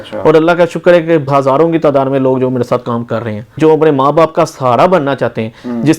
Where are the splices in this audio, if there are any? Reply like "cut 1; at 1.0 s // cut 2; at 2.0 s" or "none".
cut 1; at 1.3 s // cut 2; at 3.6 s